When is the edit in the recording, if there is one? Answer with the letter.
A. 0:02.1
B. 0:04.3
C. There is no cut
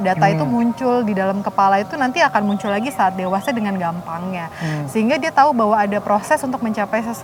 C